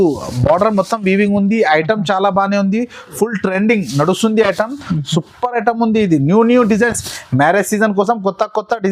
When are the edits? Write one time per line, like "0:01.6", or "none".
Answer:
none